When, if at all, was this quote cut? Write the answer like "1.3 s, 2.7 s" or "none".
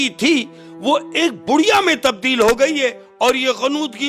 none